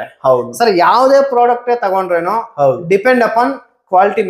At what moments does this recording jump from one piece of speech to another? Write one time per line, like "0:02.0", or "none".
none